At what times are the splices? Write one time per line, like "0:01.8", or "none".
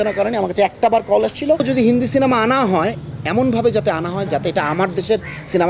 0:01.6